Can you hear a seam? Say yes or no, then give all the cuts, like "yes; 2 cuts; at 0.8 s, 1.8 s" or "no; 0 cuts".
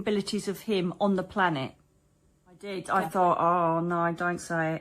yes; 1 cut; at 2.8 s